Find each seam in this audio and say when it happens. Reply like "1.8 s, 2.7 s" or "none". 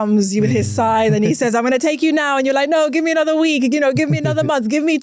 none